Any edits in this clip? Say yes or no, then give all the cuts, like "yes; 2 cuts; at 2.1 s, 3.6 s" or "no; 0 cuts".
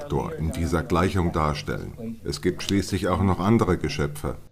yes; 1 cut; at 2.2 s